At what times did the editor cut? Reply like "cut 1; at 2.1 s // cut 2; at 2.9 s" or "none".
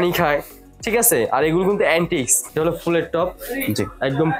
cut 1; at 2.4 s